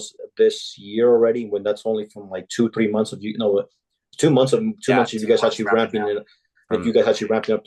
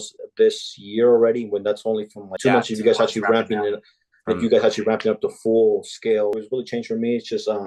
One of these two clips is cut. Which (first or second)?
second